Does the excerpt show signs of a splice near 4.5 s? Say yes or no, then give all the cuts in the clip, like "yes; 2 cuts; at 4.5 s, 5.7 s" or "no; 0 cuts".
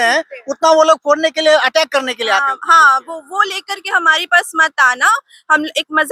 no; 0 cuts